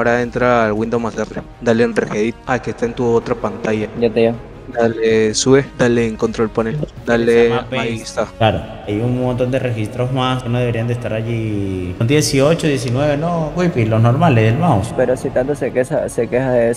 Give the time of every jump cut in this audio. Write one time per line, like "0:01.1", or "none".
none